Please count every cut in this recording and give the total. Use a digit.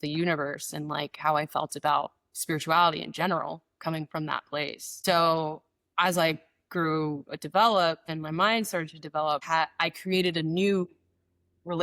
3